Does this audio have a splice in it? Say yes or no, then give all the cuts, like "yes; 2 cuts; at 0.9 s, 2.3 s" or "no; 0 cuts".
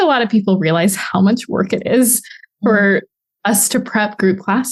no; 0 cuts